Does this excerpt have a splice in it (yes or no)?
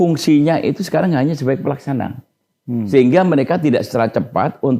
no